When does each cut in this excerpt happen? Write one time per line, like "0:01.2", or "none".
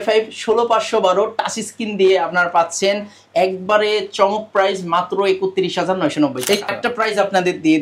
0:06.7